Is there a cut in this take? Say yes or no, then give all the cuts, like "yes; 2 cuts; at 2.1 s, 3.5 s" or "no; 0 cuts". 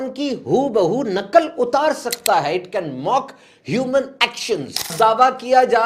yes; 1 cut; at 4.9 s